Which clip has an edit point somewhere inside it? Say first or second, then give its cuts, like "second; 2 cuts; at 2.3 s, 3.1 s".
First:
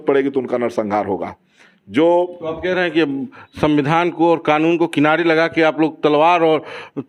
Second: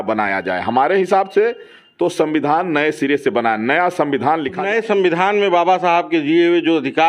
second; 1 cut; at 4.6 s